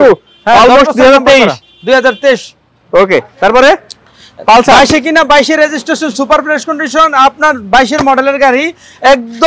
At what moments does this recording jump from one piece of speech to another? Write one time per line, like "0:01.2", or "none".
none